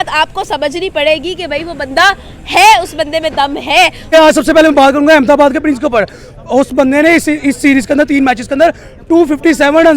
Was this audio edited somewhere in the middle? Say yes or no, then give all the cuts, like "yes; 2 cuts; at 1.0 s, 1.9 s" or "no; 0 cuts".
yes; 1 cut; at 4.1 s